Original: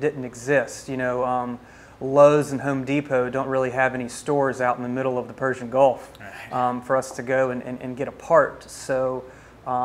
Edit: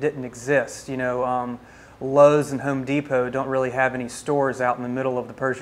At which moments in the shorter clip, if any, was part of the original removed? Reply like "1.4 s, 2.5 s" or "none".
none